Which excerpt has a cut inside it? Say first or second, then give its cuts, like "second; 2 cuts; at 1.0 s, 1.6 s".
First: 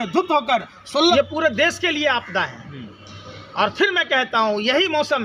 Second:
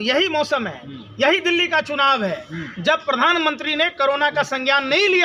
first; 1 cut; at 1.1 s